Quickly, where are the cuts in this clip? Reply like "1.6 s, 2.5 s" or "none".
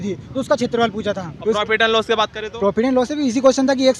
1.3 s